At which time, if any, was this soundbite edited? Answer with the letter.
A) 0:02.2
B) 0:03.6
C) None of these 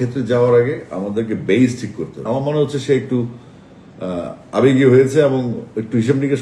A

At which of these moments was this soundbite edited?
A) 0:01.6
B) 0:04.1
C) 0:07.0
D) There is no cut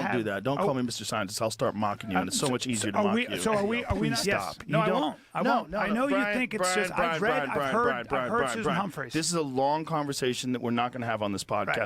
B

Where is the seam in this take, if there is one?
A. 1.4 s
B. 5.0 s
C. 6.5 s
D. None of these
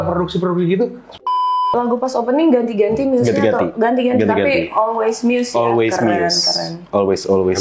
A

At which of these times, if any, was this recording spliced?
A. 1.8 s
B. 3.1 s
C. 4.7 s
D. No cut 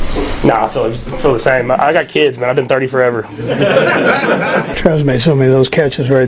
C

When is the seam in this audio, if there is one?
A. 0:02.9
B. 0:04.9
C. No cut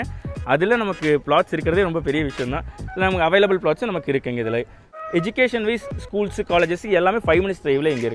B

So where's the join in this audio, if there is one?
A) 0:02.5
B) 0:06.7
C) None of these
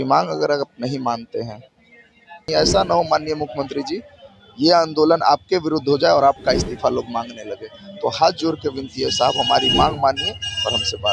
A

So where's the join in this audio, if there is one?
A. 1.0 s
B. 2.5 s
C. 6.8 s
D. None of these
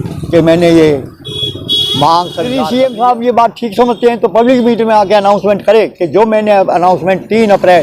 B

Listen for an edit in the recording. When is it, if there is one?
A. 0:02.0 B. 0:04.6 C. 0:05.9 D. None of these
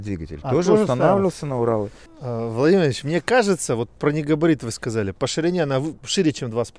A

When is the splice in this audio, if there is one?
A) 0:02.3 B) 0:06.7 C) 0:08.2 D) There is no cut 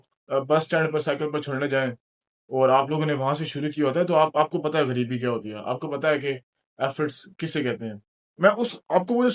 C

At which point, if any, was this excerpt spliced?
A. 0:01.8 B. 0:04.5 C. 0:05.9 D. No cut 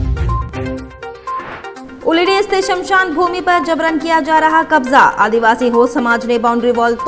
A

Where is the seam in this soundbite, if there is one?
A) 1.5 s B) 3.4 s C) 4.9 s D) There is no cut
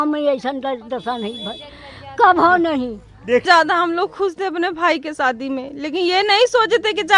B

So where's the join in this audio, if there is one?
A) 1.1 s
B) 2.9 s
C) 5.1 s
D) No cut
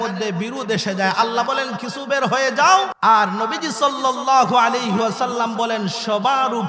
B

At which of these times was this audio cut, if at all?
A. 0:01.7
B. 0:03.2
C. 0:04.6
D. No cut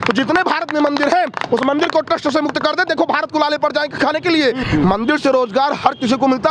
C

